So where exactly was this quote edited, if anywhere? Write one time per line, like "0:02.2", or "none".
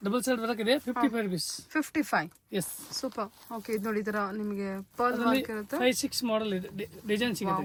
none